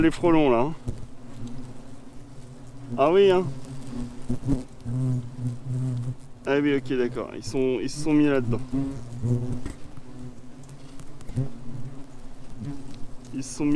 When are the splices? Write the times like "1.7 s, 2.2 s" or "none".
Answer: none